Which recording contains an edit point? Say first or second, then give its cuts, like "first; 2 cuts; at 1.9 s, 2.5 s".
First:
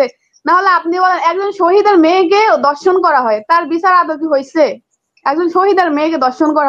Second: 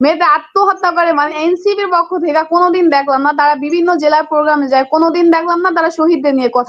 second; 1 cut; at 1.3 s